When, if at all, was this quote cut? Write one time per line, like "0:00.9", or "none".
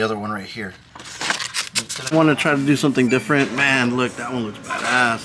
0:02.1